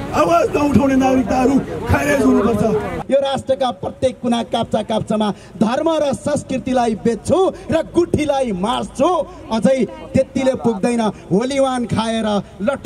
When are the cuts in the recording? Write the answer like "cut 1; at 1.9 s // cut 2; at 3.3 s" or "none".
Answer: cut 1; at 3.0 s